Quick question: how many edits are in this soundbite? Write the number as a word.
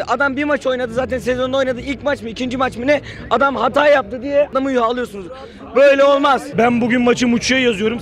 two